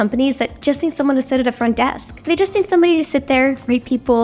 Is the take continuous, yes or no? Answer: no